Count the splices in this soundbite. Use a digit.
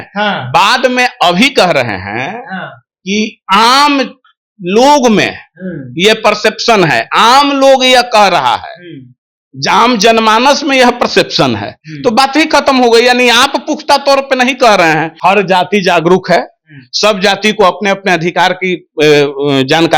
1